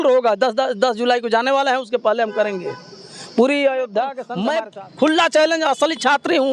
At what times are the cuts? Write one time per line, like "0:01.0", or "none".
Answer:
0:04.2